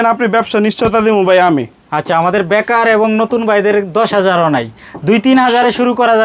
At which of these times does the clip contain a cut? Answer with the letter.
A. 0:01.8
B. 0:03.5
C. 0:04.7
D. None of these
D